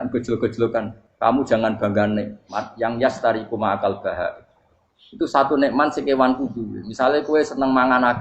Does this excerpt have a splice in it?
yes; 1 cut; at 1.0 s

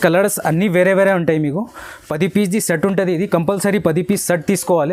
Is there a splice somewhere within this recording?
no; 0 cuts

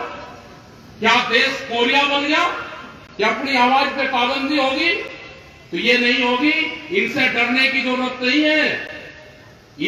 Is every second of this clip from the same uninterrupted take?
yes; 0 cuts

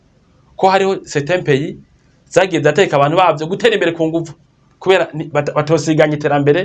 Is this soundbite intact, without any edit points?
yes; 0 cuts

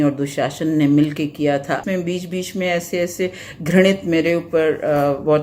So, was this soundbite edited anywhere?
yes; 1 cut; at 1.8 s

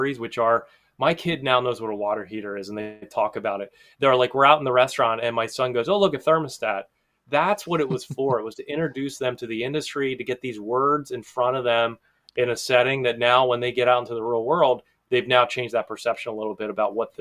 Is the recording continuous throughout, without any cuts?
yes; 0 cuts

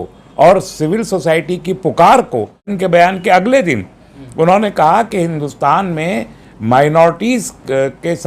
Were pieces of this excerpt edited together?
yes; 1 cut; at 2.7 s

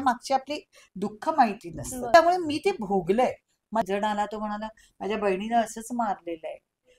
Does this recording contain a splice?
yes; 2 cuts; at 2.1 s, 3.8 s

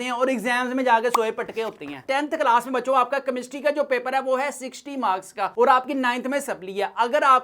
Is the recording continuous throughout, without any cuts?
no; 1 cut; at 2.0 s

